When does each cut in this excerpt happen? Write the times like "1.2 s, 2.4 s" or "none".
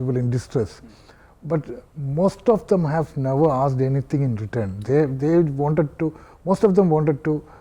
none